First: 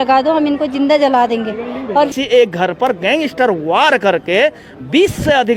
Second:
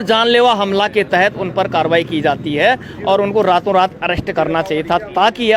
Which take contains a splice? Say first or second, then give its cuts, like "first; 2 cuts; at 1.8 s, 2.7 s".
first; 1 cut; at 2.1 s